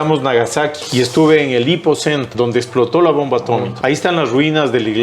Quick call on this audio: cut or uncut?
cut